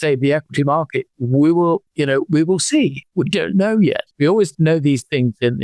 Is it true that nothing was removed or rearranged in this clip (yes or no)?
no